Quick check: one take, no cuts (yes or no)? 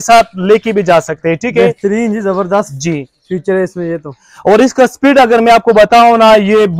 yes